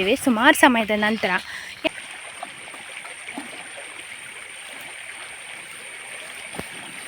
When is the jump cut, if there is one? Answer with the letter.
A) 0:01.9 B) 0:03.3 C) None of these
A